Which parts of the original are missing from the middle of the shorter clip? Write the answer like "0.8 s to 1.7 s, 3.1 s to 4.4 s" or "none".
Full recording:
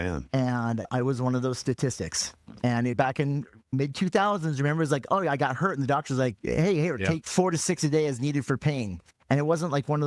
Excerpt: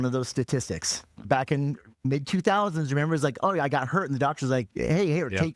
2.5 s to 2.9 s